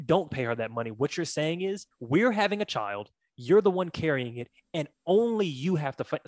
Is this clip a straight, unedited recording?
no; 1 cut; at 1.9 s

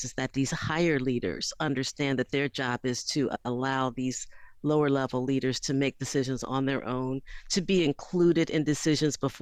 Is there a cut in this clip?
no; 0 cuts

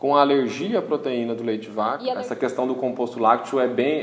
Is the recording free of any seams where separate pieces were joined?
no; 1 cut; at 2.2 s

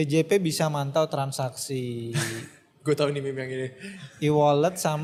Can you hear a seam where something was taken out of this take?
no; 0 cuts

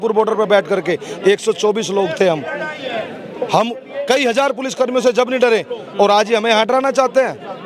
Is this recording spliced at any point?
no; 0 cuts

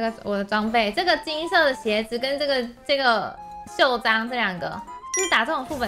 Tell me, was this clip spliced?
no; 0 cuts

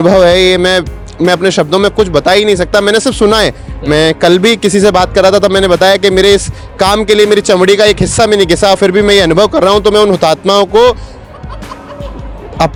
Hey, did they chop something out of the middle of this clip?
no; 0 cuts

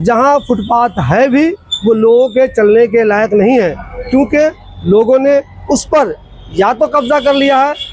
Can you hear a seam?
no; 0 cuts

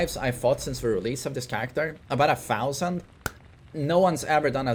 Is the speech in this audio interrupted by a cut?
no; 0 cuts

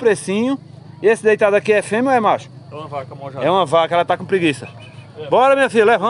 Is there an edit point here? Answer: no; 0 cuts

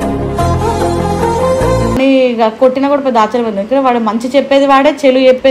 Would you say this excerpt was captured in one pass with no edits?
no; 1 cut; at 2.0 s

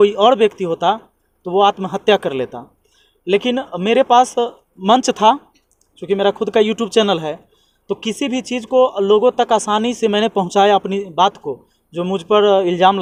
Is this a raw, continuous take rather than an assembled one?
yes; 0 cuts

